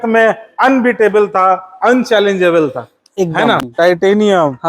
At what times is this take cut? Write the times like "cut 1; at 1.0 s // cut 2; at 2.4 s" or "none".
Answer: cut 1; at 3.7 s